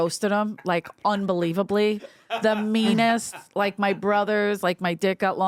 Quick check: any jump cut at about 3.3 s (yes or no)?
no